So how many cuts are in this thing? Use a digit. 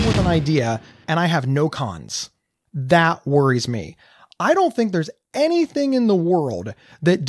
1